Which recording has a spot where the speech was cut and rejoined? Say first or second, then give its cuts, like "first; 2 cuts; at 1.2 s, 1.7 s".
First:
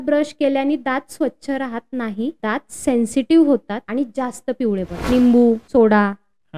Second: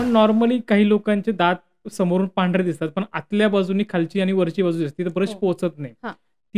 first; 4 cuts; at 2.4 s, 3.8 s, 5.0 s, 5.6 s